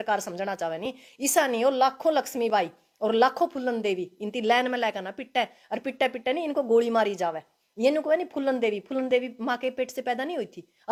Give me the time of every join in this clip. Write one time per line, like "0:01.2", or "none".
none